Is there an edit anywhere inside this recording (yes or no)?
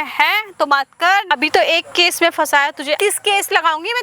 yes